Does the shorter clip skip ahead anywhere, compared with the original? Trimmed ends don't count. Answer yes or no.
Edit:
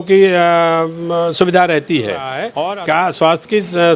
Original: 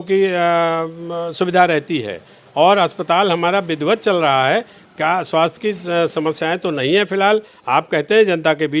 yes